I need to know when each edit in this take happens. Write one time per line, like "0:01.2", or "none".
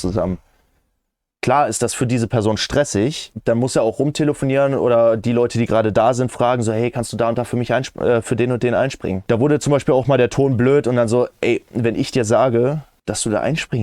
0:03.3
0:09.2
0:12.9